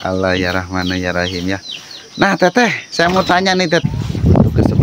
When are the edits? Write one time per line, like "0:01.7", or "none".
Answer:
0:03.8